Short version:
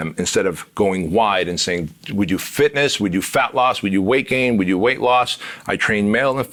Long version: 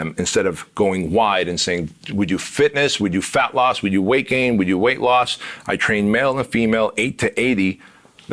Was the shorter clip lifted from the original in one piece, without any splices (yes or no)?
yes